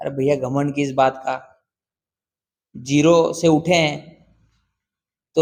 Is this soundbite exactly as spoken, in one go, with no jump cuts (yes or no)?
yes